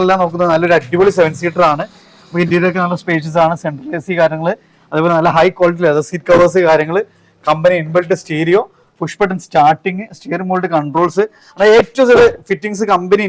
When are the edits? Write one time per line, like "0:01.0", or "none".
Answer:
none